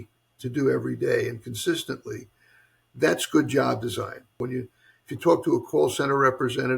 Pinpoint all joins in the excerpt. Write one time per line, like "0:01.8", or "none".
0:04.4